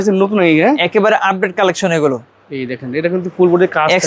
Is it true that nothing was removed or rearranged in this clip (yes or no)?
yes